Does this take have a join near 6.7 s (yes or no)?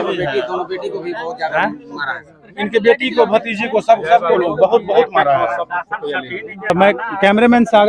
yes